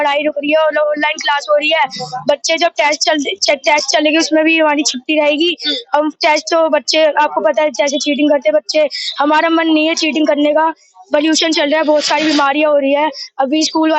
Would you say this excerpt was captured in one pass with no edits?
yes; 0 cuts

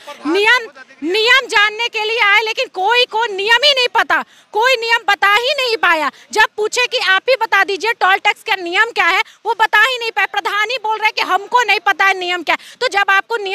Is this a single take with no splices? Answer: yes; 0 cuts

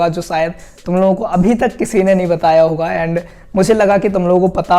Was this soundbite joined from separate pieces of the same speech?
no; 0 cuts

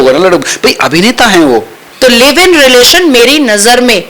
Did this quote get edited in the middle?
yes; 1 cut; at 1.8 s

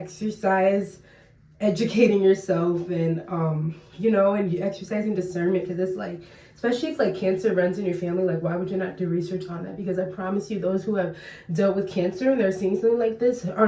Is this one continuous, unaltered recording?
yes; 0 cuts

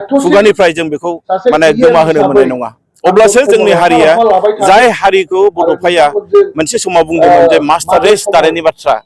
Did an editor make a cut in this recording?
no; 0 cuts

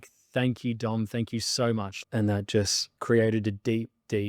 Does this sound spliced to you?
yes; 2 cuts; at 1.9 s, 2.9 s

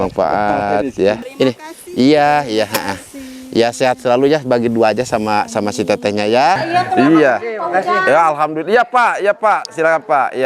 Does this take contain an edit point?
yes; 2 cuts; at 1.3 s, 6.6 s

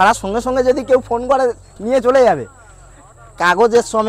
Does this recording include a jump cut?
no; 0 cuts

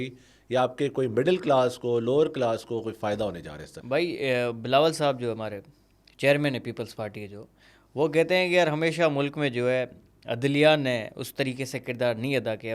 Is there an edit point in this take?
no; 0 cuts

